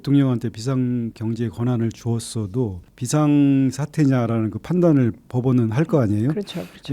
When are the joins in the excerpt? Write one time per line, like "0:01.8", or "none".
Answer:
0:01.1
0:02.9